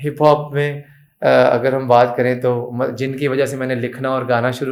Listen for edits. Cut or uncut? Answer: uncut